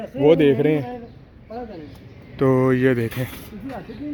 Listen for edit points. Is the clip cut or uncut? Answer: uncut